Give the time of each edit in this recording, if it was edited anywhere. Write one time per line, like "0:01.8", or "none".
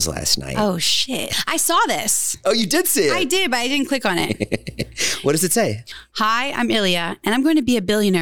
0:01.3
0:05.9

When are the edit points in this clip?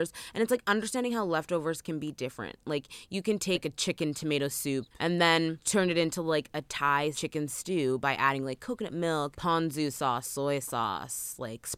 0:03.6
0:04.9
0:05.6
0:07.2
0:09.4

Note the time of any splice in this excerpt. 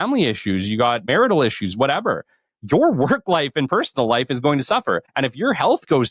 0:01.1
0:05.1

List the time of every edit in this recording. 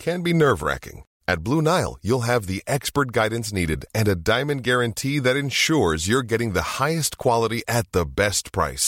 none

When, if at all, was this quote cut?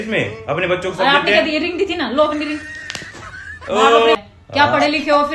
0:04.2

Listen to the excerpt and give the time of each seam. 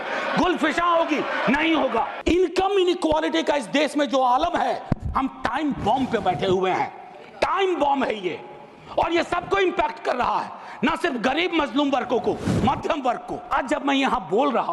0:02.1
0:13.5

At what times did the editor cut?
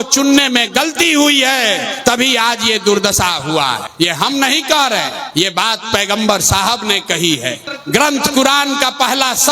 0:01.9
0:03.9
0:05.2
0:07.7

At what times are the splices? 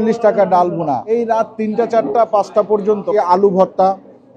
0:01.0
0:03.1

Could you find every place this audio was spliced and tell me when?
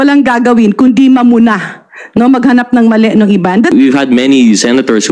0:03.7

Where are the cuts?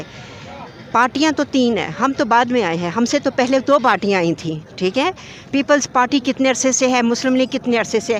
none

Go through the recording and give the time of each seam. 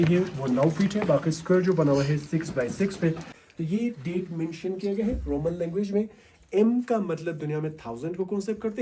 0:03.3

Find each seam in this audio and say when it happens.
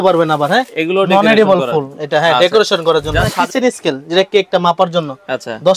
0:03.4

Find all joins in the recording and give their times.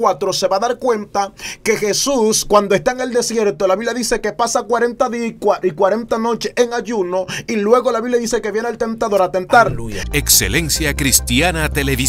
0:09.9

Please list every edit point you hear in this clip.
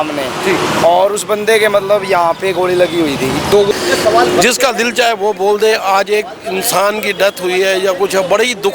0:03.7

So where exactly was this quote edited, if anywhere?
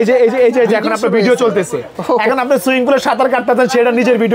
none

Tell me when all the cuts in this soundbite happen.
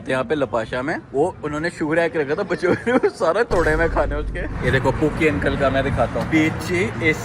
0:04.5
0:06.3

